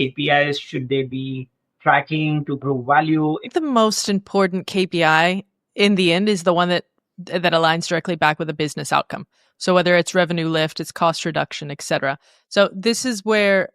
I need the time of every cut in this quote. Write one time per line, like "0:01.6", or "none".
0:03.5